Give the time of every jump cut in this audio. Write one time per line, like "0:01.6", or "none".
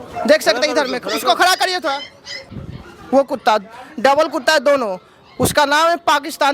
0:02.5